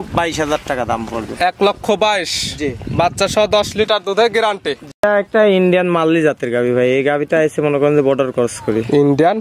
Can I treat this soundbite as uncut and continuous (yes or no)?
no